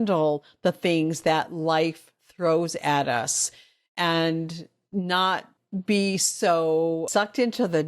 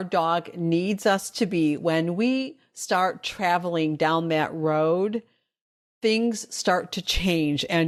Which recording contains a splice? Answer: first; 2 cuts; at 5.6 s, 7.1 s

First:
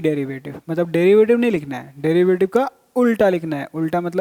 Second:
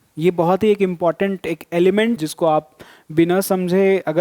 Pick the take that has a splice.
second; 1 cut; at 2.2 s

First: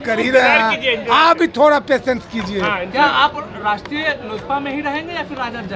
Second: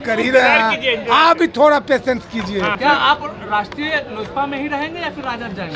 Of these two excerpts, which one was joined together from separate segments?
second; 1 cut; at 2.8 s

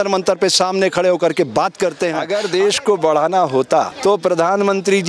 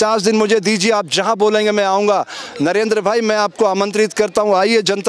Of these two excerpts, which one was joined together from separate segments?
first; 2 cuts; at 2.2 s, 3.9 s

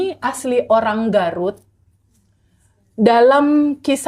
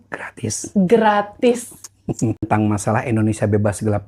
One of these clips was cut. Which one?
second; 1 cut; at 2.4 s

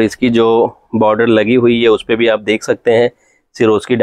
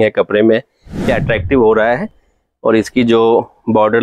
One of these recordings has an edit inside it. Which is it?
second; 1 cut; at 1.1 s

